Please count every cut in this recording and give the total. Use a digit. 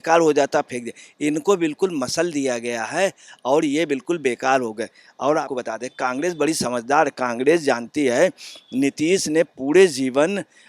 1